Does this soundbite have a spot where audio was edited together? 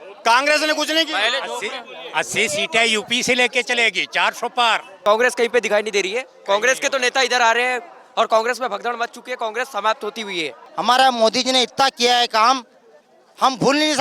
yes; 2 cuts; at 5.0 s, 10.6 s

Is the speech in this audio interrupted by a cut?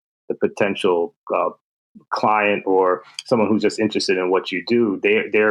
no; 0 cuts

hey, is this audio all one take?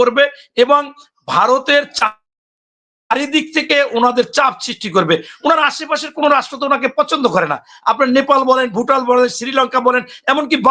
yes; 0 cuts

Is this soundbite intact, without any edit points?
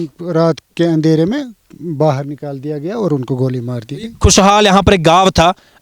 yes; 0 cuts

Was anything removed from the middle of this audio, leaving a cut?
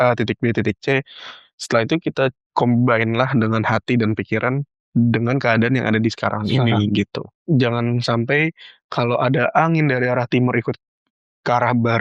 yes; 1 cut; at 7.3 s

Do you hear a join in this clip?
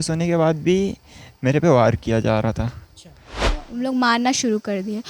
yes; 1 cut; at 3.6 s

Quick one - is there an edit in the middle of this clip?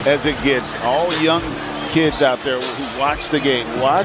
no; 0 cuts

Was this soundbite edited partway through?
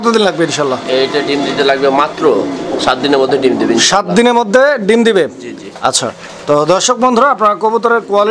no; 0 cuts

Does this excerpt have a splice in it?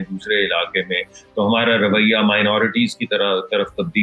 no; 0 cuts

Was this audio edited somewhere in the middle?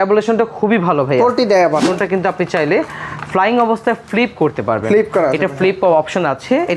yes; 1 cut; at 1.9 s

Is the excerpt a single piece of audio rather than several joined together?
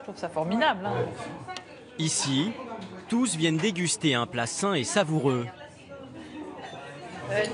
no; 1 cut; at 5.7 s

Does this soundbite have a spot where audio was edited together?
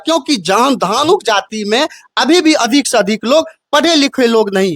no; 0 cuts

